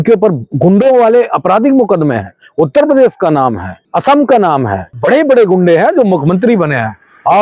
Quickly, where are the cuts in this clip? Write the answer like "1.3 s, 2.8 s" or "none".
3.9 s, 4.8 s